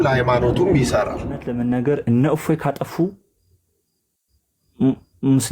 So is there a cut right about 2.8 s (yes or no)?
no